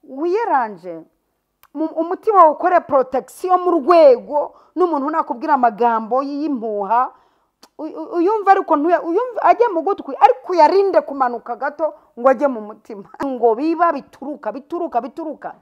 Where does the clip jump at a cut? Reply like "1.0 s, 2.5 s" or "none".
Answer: 13.3 s